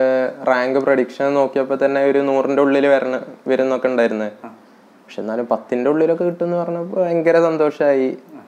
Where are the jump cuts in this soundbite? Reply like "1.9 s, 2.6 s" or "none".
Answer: none